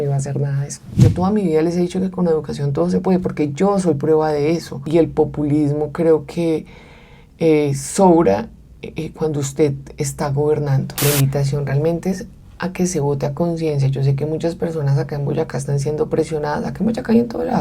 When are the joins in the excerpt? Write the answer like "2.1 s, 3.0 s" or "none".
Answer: 0.9 s, 4.8 s, 10.9 s